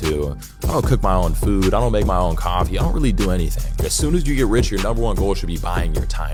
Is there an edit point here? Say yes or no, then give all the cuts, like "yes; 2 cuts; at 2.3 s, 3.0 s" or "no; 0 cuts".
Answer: no; 0 cuts